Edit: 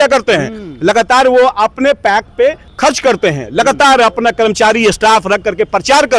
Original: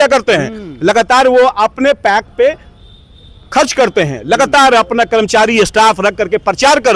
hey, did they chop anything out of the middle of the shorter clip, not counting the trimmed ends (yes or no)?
yes